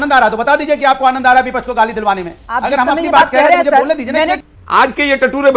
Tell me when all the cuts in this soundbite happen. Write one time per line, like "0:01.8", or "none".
0:04.5